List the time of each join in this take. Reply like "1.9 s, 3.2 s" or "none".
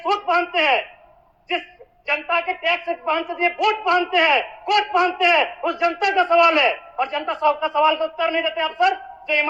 none